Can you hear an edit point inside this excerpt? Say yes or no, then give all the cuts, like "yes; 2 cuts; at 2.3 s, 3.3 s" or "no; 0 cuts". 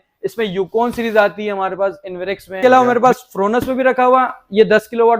yes; 1 cut; at 2.6 s